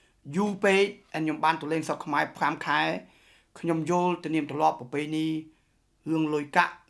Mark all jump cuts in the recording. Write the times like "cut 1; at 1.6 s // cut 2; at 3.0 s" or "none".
none

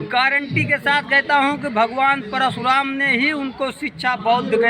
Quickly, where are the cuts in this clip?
none

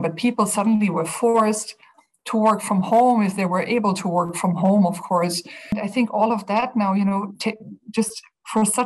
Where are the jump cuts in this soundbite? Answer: cut 1; at 5.8 s

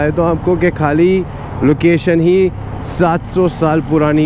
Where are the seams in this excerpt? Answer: none

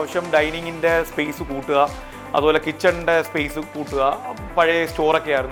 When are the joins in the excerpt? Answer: none

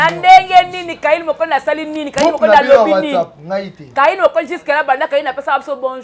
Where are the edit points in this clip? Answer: none

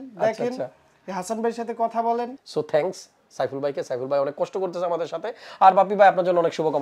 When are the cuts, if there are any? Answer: cut 1; at 2.4 s

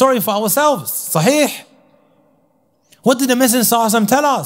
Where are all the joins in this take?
none

